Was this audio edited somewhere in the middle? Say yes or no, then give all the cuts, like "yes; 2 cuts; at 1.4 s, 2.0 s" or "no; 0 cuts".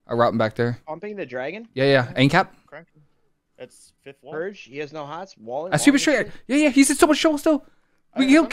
no; 0 cuts